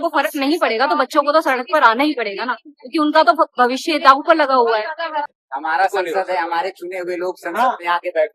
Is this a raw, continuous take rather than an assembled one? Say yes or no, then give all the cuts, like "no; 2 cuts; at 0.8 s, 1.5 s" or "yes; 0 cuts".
no; 1 cut; at 5.3 s